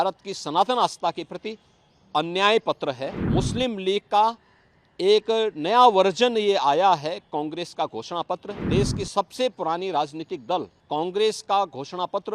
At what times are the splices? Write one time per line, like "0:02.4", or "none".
0:03.1
0:08.5
0:10.8